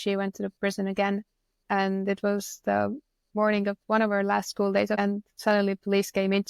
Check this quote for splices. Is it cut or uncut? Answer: cut